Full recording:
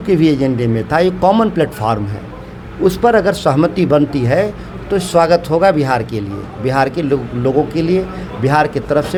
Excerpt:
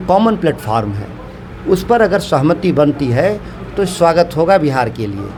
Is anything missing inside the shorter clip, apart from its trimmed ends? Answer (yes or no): no